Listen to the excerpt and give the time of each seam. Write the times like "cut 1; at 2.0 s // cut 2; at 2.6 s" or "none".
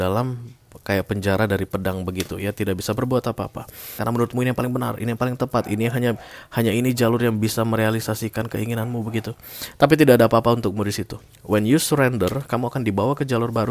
cut 1; at 3.9 s